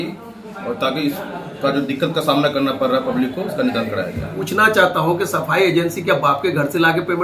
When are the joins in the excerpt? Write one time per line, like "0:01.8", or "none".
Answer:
0:04.4

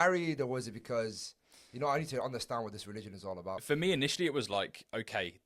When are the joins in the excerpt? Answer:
0:03.6

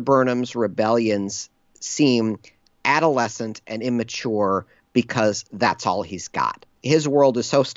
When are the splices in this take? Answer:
0:06.7

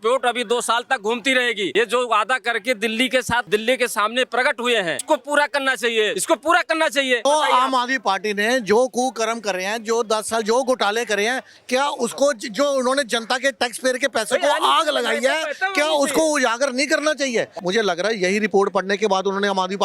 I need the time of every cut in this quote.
0:01.7
0:03.4
0:05.0
0:06.1
0:07.3
0:17.5

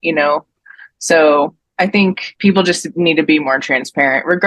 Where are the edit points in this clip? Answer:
0:02.3

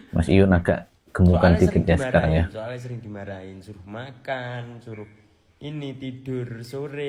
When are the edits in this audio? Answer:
none

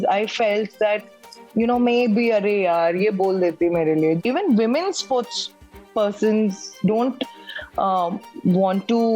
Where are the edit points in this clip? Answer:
0:04.2

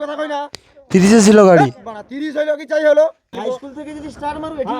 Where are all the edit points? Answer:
0:03.3

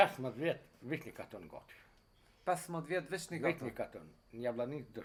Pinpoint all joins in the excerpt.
none

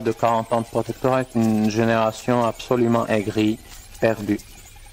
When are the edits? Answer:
0:03.9

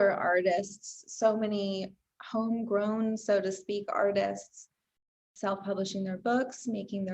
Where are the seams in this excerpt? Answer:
0:05.2

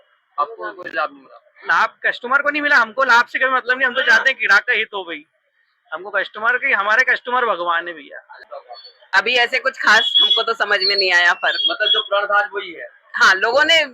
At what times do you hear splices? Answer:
0:08.3

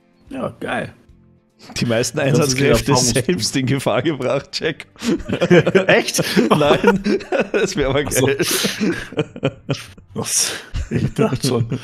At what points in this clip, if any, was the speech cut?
none

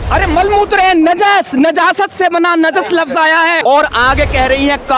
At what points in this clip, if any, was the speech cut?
0:03.6

